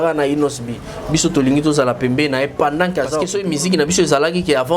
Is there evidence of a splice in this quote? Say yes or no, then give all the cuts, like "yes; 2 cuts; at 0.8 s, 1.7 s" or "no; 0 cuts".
yes; 1 cut; at 3.3 s